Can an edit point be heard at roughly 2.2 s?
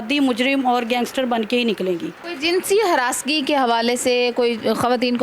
yes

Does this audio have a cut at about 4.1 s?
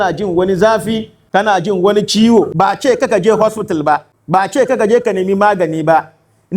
yes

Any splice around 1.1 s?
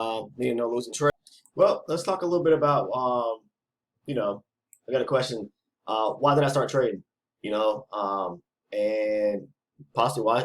yes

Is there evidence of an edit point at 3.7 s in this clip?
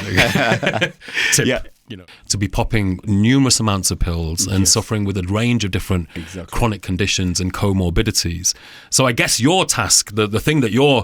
no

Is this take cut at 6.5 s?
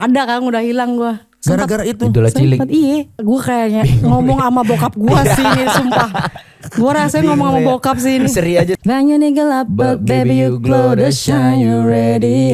no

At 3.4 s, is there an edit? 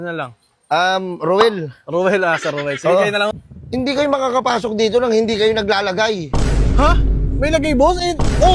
yes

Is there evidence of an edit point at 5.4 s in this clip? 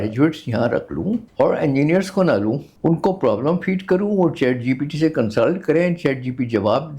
no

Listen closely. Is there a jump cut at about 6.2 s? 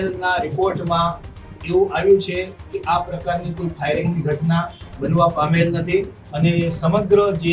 yes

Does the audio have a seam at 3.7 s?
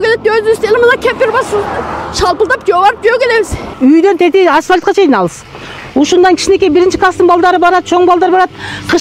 yes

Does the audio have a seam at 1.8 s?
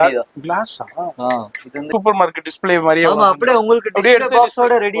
yes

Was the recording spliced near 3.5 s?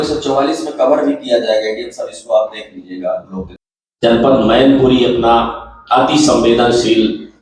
yes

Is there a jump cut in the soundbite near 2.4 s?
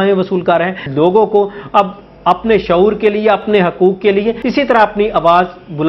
no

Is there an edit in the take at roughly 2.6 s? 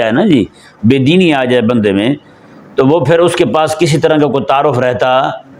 no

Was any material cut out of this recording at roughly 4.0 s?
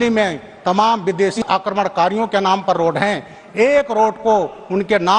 no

